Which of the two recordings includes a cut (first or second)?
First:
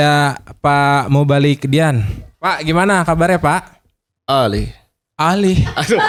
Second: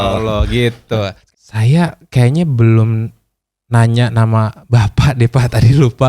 second